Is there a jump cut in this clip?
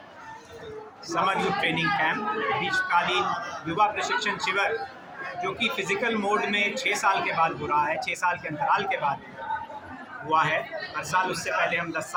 no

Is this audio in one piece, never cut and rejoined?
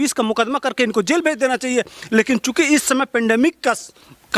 yes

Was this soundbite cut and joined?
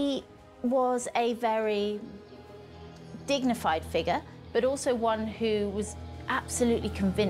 no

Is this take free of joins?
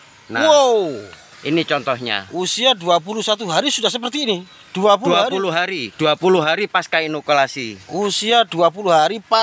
yes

